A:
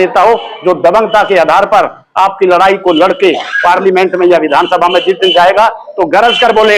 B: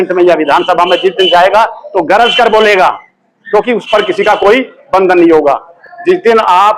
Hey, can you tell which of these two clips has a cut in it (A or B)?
B